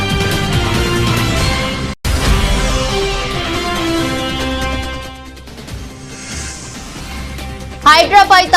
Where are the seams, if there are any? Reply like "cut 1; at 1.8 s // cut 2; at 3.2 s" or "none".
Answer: cut 1; at 2.0 s